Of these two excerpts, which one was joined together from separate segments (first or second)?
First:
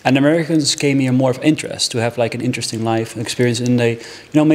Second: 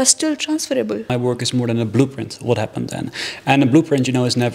second